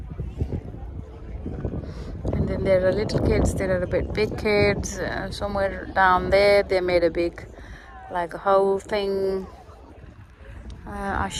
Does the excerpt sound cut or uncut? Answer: uncut